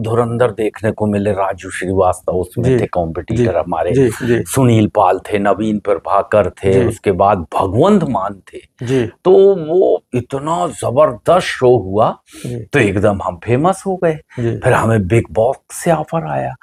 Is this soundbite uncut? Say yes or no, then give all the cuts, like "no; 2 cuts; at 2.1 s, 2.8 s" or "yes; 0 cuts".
yes; 0 cuts